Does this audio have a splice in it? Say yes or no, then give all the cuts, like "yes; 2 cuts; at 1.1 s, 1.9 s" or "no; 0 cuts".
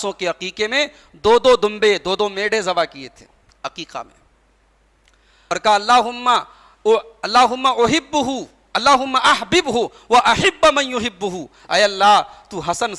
yes; 1 cut; at 5.4 s